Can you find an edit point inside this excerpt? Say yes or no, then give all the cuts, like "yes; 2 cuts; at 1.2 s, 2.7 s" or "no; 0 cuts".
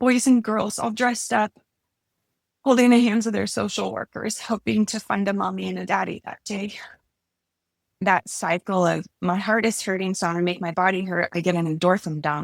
yes; 1 cut; at 8.0 s